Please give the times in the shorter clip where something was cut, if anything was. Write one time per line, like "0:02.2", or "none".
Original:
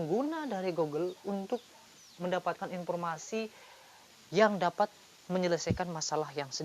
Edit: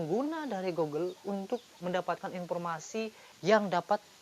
0:01.7
0:03.3